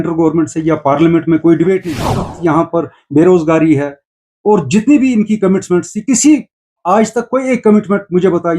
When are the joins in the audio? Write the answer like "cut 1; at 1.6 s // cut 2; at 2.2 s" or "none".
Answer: cut 1; at 2.2 s